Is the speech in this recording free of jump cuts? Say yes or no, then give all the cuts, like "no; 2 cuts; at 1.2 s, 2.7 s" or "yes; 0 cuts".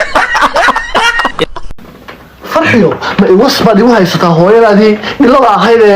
no; 1 cut; at 1.7 s